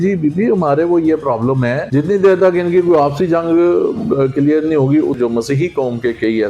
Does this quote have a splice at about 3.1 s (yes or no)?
no